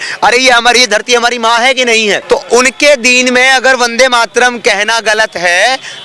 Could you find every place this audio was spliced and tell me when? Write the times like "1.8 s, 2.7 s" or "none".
2.2 s